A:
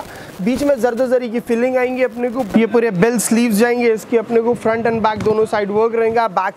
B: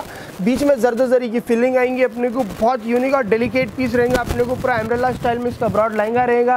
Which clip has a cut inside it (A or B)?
A